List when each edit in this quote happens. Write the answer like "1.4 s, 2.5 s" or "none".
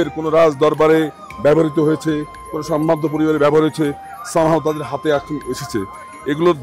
none